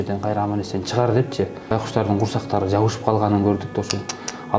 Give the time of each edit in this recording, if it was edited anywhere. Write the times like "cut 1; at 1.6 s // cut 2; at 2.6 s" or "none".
cut 1; at 1.7 s